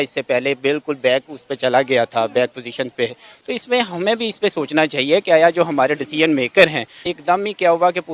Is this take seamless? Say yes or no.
no